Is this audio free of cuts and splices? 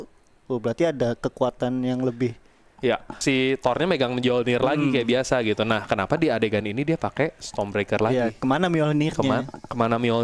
no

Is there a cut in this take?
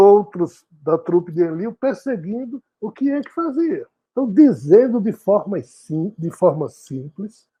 no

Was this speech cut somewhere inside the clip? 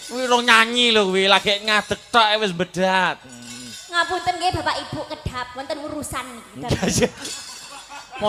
no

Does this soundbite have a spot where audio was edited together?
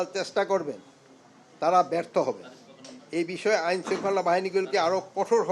no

